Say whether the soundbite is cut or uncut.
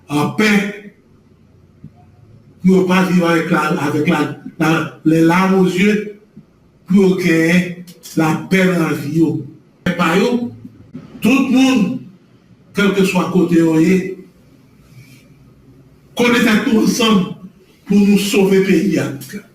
cut